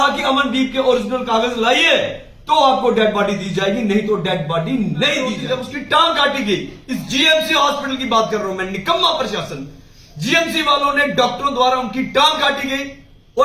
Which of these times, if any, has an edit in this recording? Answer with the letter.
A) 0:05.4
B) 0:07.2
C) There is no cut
A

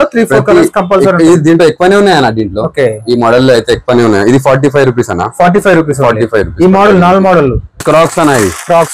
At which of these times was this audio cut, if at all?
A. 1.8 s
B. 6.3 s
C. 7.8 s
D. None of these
C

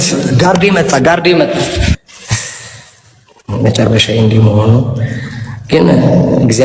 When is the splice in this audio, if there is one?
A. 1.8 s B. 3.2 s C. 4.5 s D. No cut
A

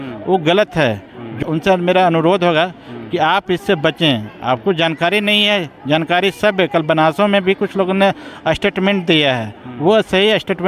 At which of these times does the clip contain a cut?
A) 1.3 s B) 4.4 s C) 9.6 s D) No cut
A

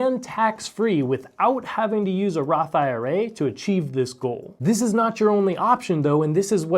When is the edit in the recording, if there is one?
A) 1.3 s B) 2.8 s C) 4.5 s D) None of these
C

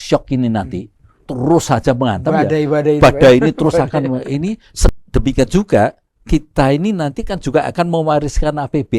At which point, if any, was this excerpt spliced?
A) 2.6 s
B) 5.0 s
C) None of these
B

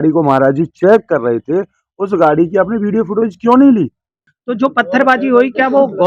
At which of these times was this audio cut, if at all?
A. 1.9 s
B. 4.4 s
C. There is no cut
B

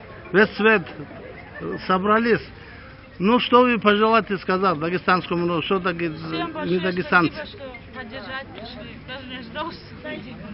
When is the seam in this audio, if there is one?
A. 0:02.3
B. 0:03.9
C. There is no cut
C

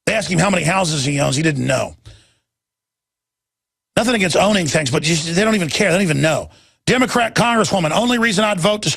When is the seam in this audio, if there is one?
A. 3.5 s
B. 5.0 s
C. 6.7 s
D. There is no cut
B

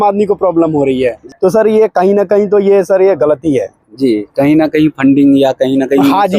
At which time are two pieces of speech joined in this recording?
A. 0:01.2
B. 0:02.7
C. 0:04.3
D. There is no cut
A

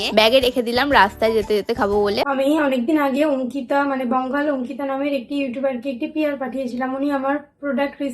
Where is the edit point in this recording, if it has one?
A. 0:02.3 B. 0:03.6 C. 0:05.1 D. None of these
A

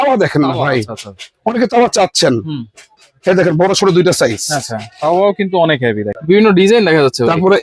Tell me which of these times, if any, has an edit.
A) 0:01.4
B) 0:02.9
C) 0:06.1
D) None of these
C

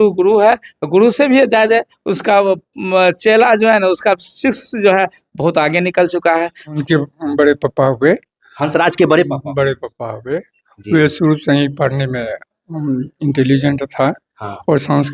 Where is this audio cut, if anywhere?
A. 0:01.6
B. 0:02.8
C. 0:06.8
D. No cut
C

